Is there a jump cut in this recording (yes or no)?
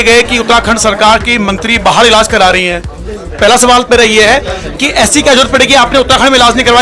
no